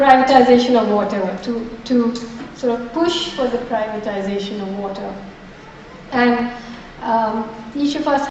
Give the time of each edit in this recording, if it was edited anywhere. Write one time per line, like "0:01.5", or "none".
0:07.0